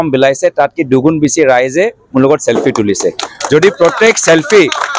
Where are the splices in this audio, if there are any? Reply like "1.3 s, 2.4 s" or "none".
none